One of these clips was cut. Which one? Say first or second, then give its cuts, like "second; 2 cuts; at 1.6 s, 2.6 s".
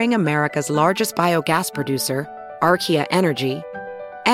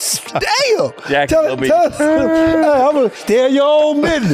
second; 2 cuts; at 1.0 s, 3.1 s